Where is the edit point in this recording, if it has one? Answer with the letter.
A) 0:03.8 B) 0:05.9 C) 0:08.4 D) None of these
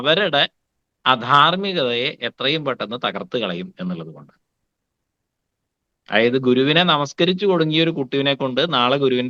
D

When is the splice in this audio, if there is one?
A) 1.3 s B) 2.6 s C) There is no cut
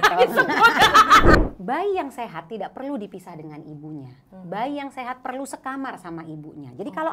A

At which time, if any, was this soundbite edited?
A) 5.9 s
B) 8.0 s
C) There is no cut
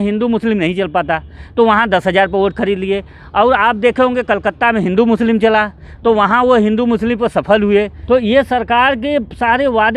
B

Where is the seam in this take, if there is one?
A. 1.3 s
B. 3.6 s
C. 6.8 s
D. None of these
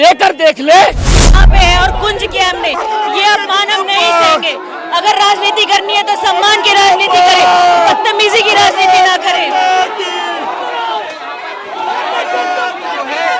A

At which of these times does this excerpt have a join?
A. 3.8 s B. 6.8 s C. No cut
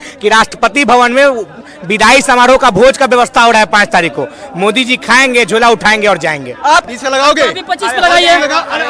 B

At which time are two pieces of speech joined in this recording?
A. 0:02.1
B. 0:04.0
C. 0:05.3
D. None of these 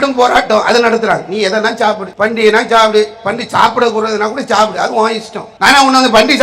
A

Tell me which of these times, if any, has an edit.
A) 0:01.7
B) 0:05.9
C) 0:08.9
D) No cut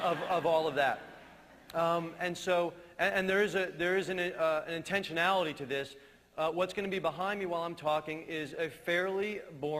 A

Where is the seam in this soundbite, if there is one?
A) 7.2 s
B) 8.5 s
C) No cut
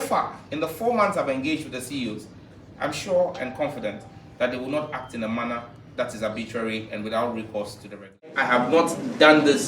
B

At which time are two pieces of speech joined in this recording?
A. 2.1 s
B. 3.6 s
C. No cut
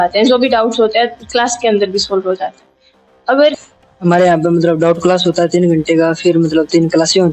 B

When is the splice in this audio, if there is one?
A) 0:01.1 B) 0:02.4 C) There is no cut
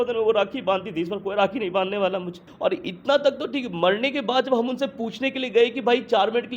B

